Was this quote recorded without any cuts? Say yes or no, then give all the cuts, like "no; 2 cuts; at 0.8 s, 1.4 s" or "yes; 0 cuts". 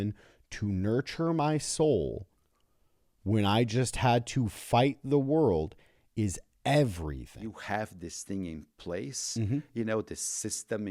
no; 1 cut; at 7.4 s